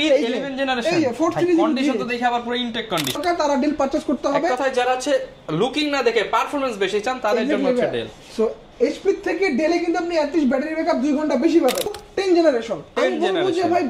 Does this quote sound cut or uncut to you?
cut